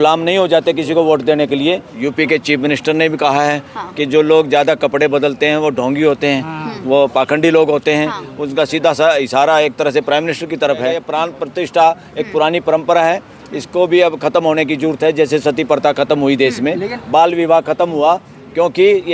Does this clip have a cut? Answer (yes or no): yes